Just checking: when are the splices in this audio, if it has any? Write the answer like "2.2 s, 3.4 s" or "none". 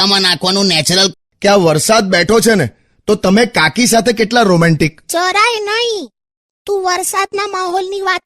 1.3 s